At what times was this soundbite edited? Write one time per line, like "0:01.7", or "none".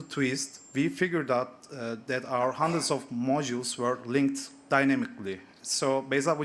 none

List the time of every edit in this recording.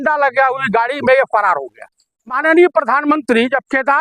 0:02.4

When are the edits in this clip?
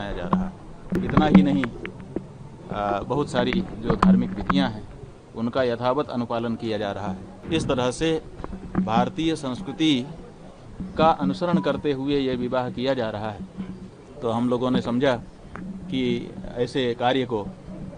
0:01.0
0:07.3

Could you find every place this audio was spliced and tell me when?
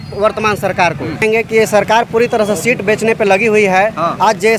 0:01.2

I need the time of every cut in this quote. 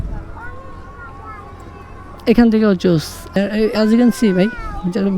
0:03.3

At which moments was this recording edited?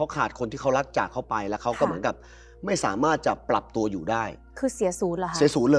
none

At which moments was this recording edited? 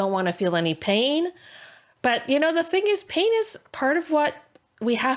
none

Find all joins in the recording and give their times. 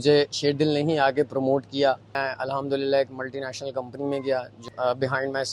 0:02.2
0:04.6

